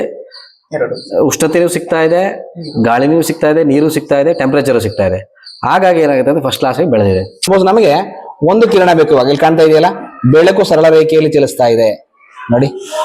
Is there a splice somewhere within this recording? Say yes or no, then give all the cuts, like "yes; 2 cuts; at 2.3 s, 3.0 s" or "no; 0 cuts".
yes; 1 cut; at 7.5 s